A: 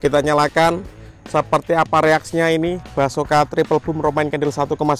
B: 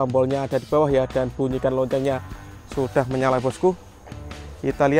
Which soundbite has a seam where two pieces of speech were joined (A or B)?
A